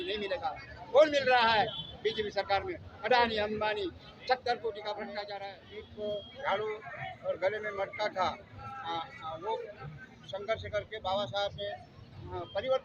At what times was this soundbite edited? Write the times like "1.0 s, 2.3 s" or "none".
5.3 s